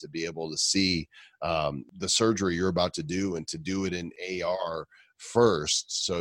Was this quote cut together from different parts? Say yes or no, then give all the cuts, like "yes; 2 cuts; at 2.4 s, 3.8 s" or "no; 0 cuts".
yes; 2 cuts; at 1.9 s, 4.1 s